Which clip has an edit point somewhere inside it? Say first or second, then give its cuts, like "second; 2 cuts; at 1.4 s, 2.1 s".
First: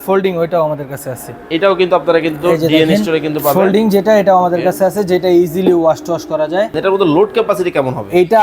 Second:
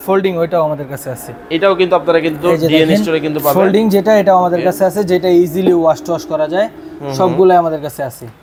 first; 1 cut; at 6.8 s